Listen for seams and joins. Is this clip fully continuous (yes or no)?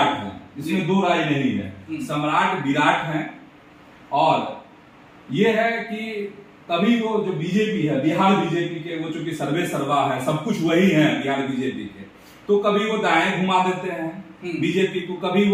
yes